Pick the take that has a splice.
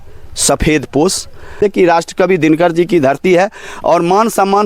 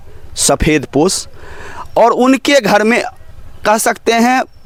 first; 1 cut; at 1.6 s

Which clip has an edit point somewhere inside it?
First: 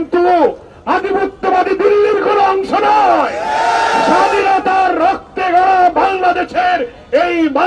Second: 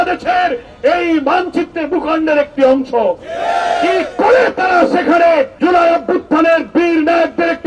second; 1 cut; at 5.5 s

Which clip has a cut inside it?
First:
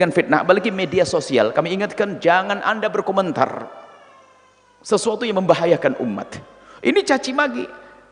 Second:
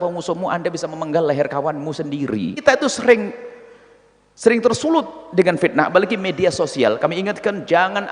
second; 1 cut; at 2.6 s

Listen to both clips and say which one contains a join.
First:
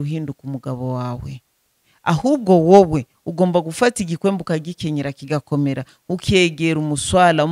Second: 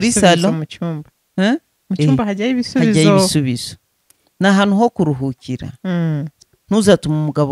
second; 1 cut; at 6.3 s

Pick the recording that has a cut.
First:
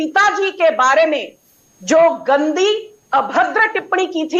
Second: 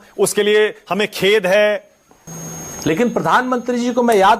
second; 1 cut; at 1.8 s

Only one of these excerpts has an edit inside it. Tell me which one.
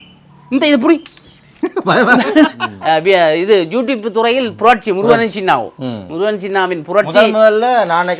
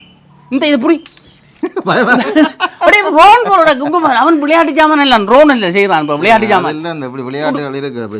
first; 1 cut; at 2.6 s

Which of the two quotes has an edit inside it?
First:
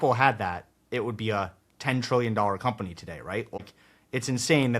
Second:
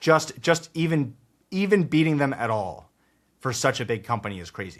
first; 1 cut; at 3.6 s

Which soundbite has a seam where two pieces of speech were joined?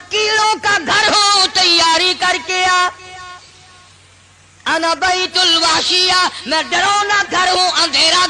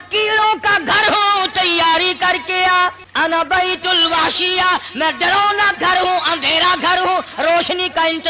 second; 1 cut; at 3.0 s

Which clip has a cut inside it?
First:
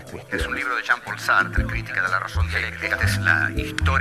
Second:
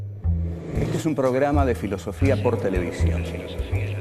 first; 1 cut; at 1.9 s

